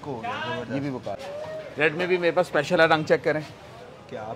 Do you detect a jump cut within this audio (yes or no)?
yes